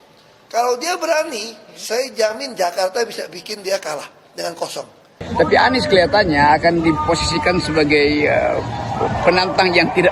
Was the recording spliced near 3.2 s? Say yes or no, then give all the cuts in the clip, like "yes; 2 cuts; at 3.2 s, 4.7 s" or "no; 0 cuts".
no; 1 cut; at 5.2 s